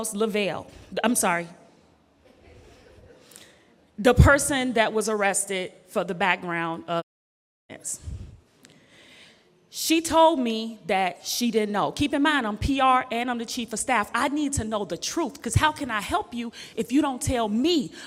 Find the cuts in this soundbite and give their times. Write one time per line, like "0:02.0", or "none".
none